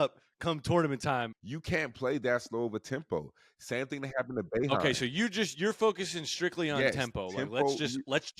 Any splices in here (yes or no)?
yes